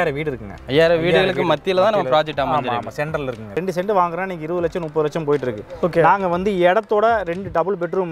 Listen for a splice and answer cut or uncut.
cut